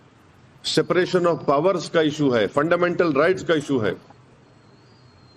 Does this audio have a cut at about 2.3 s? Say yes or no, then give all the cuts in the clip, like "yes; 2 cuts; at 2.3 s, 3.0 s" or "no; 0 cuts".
yes; 1 cut; at 2.3 s